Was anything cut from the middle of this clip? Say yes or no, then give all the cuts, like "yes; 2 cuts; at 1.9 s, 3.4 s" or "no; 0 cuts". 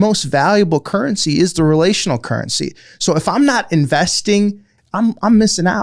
yes; 1 cut; at 4.7 s